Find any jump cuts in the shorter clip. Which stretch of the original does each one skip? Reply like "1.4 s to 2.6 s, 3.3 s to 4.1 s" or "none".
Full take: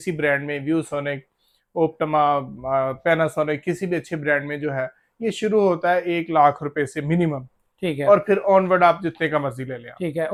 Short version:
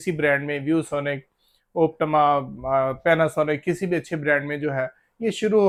none